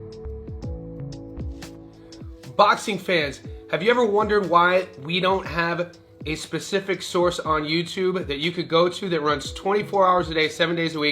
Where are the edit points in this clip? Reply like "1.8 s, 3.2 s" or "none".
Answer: 2.3 s